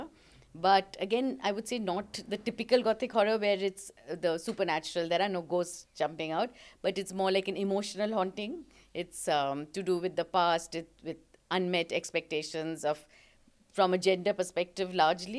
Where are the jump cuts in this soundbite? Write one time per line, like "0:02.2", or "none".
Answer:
none

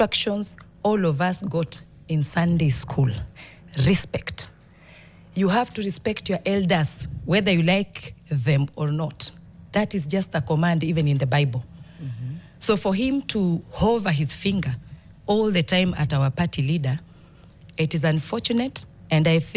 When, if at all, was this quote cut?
none

